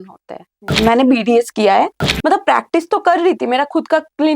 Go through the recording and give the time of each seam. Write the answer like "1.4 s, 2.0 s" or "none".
0.8 s, 2.0 s